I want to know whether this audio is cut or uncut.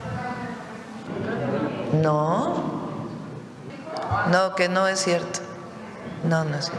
cut